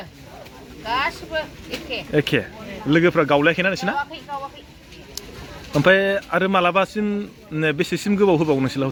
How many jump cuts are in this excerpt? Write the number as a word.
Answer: zero